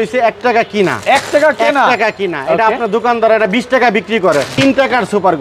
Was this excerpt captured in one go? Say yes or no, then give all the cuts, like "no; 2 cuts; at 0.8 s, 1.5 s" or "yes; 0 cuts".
no; 1 cut; at 4.5 s